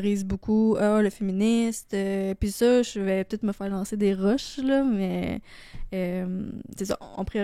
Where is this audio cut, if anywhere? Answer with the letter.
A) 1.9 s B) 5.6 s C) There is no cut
C